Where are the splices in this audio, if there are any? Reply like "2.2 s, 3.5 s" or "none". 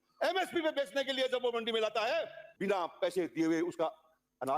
2.4 s